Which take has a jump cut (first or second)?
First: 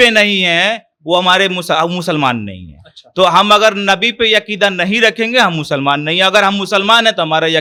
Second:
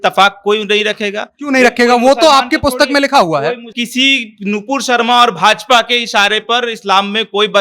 second